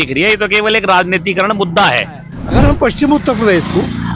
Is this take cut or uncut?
cut